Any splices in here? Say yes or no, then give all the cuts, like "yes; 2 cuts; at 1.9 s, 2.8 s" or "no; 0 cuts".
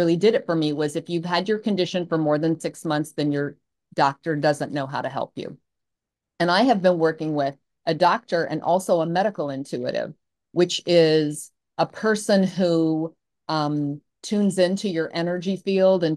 no; 0 cuts